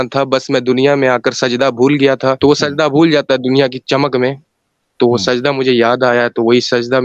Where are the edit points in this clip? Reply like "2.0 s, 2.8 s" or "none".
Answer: 2.4 s